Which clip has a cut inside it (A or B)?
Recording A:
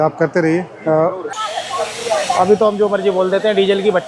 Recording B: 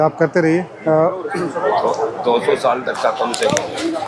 A